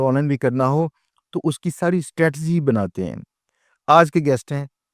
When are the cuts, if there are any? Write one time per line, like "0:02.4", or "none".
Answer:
none